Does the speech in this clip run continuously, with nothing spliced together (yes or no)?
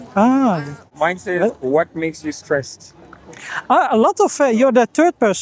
no